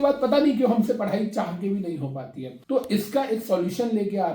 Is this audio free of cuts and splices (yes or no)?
no